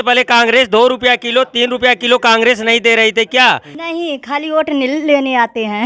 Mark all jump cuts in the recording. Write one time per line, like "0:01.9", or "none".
0:03.8

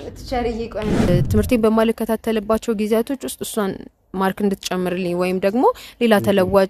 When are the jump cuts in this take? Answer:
0:01.1

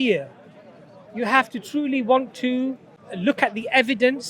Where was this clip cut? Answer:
0:03.0

